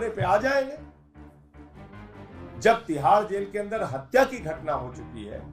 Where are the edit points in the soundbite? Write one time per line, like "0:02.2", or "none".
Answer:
none